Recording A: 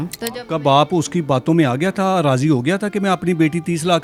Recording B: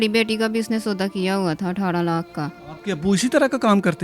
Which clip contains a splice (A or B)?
B